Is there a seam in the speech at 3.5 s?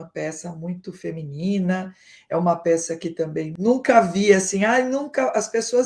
yes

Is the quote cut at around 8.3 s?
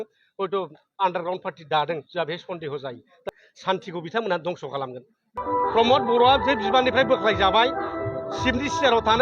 no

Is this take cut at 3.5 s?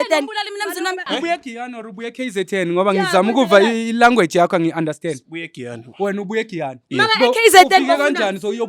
no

